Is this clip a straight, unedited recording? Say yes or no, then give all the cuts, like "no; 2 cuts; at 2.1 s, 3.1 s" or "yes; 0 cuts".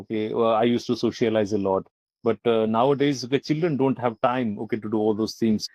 yes; 0 cuts